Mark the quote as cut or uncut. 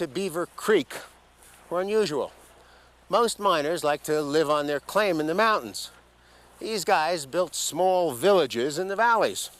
uncut